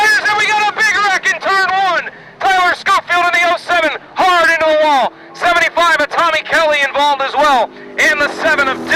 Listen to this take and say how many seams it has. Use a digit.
0